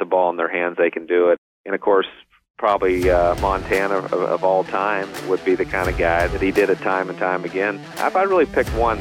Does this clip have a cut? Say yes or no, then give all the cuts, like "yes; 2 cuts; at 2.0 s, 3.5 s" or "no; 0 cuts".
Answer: yes; 4 cuts; at 1.4 s, 5.2 s, 6.3 s, 7.9 s